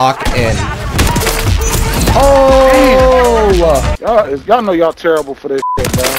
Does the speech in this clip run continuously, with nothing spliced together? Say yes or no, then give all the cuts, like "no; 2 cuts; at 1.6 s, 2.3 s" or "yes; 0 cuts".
no; 1 cut; at 3.9 s